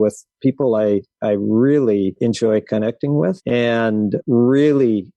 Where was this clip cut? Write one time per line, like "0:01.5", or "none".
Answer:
0:02.2
0:03.7